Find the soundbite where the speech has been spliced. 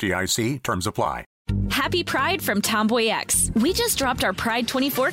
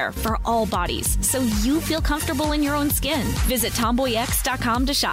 first; 1 cut; at 1.3 s

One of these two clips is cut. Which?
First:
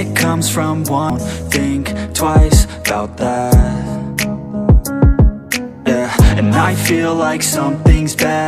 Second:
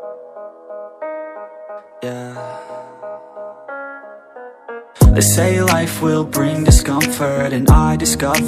first; 1 cut; at 1.1 s

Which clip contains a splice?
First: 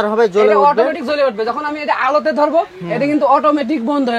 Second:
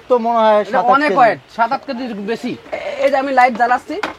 second; 1 cut; at 2.7 s

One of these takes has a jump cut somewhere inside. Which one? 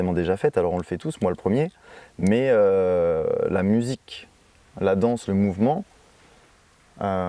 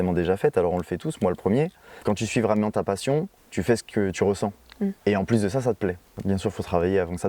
second; 4 cuts; at 1.9 s, 3.4 s, 5.0 s, 6.1 s

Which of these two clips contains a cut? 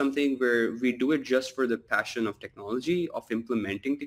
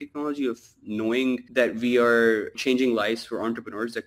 second; 2 cuts; at 1.5 s, 2.5 s

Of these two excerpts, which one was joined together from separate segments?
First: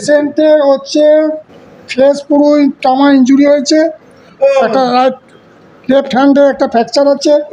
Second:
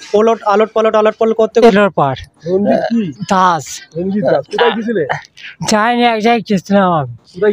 second; 1 cut; at 1.7 s

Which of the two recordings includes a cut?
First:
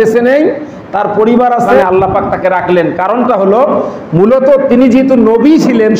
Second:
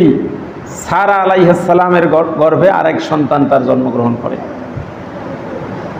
first; 1 cut; at 1.8 s

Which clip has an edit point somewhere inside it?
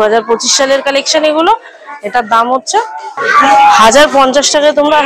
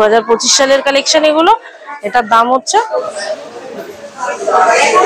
second; 1 cut; at 2.9 s

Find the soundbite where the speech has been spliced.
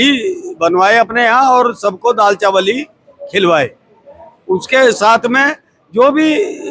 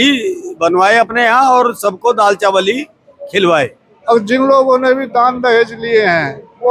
second; 1 cut; at 3.9 s

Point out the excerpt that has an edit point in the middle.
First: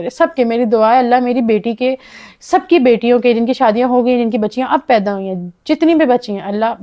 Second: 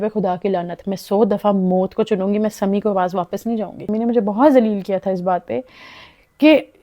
second; 1 cut; at 3.8 s

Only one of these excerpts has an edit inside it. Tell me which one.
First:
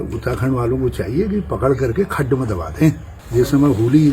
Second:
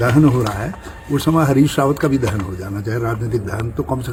first; 1 cut; at 3.1 s

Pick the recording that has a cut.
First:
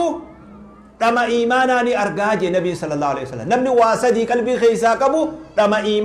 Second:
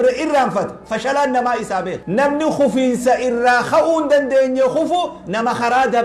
second; 1 cut; at 2.0 s

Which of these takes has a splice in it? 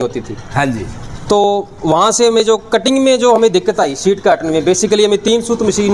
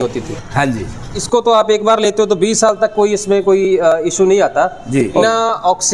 second; 2 cuts; at 1.1 s, 5.2 s

